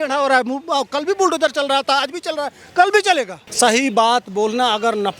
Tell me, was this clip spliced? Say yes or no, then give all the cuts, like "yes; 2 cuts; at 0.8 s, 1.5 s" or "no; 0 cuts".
yes; 1 cut; at 3.4 s